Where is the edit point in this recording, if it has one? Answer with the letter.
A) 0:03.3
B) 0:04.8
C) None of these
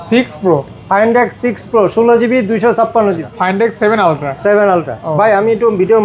A